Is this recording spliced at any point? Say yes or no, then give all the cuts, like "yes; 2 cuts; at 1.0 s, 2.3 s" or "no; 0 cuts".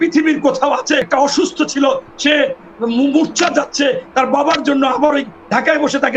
yes; 1 cut; at 1.1 s